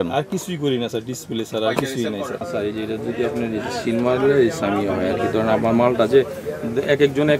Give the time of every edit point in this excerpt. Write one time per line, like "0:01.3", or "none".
0:02.4